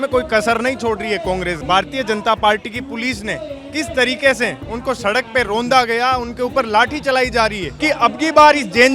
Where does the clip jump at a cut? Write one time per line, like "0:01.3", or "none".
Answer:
0:01.5
0:07.7

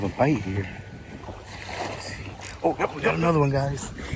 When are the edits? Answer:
0:03.1

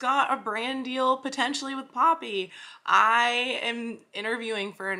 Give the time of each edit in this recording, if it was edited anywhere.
none

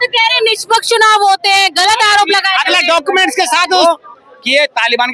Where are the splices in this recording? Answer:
0:03.8

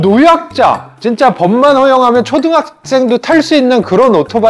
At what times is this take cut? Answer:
none

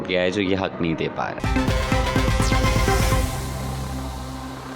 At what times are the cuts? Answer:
0:01.4

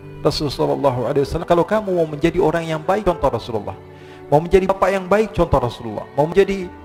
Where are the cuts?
none

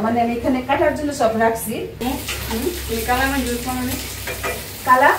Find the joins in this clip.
0:01.9

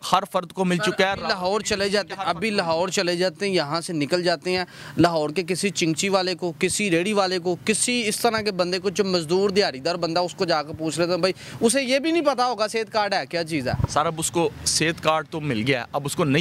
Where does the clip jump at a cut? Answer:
none

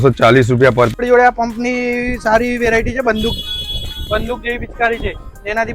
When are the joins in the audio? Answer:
0:01.0

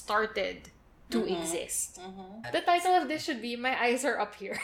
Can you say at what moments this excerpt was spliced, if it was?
0:02.4

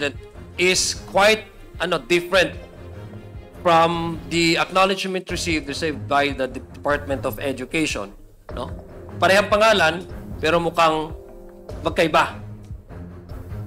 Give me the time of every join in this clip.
none

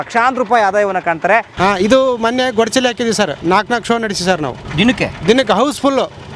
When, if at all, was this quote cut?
0:01.5
0:03.4
0:05.0

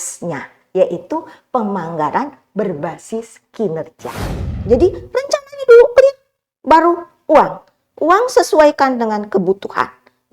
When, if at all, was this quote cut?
0:04.3

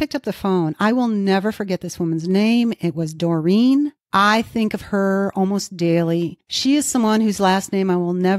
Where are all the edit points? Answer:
0:04.0
0:06.4

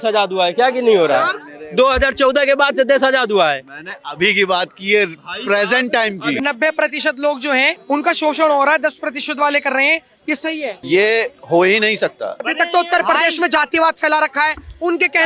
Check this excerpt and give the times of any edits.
0:06.4
0:07.8
0:10.8
0:12.4

